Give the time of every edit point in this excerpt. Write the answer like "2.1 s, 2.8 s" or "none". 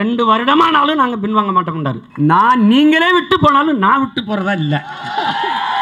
2.0 s

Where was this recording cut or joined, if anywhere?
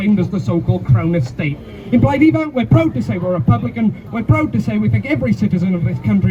none

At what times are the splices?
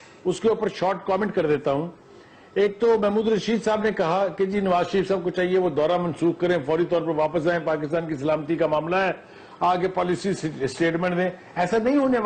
3.1 s

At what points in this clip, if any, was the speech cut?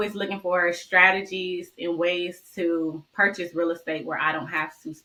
none

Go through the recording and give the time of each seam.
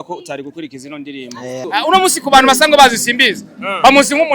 1.6 s

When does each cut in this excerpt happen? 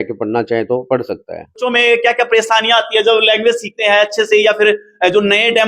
1.6 s

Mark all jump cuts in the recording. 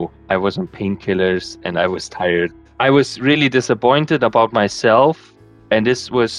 none

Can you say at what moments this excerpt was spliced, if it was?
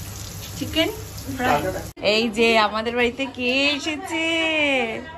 1.9 s

